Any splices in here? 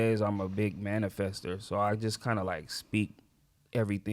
no; 0 cuts

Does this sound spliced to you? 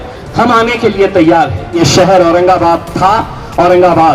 yes; 1 cut; at 1.8 s

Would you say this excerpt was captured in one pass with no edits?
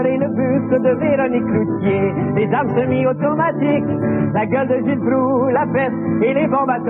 no; 1 cut; at 1.3 s

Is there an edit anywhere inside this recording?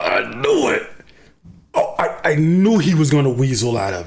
no; 0 cuts

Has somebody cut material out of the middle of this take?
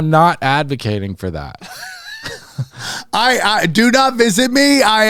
no; 0 cuts

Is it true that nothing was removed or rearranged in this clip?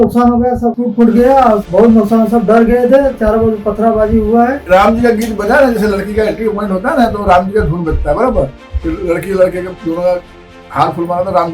no; 3 cuts; at 0.8 s, 1.7 s, 4.6 s

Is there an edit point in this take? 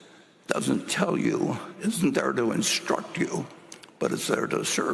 no; 0 cuts

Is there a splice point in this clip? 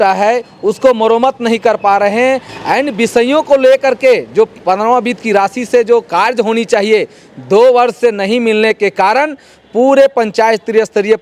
no; 0 cuts

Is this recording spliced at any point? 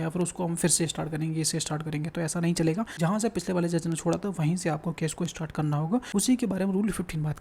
yes; 2 cuts; at 2.9 s, 6.1 s

